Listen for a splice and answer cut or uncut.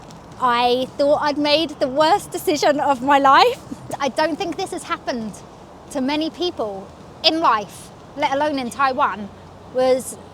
cut